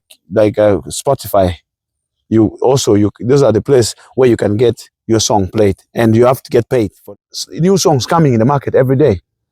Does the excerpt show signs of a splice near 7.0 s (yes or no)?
yes